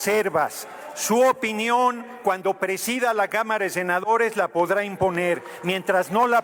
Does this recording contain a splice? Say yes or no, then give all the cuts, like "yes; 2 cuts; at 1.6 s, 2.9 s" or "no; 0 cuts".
no; 0 cuts